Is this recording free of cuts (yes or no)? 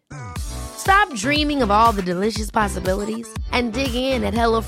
yes